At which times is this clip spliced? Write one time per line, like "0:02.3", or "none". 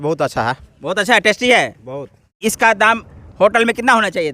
0:02.4